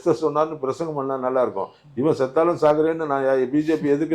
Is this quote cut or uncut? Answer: uncut